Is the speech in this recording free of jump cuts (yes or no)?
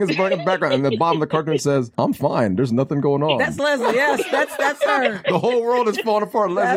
yes